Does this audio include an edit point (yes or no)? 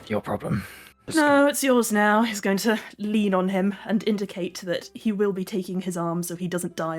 yes